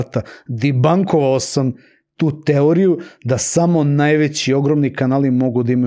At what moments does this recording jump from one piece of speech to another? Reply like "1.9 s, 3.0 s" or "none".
none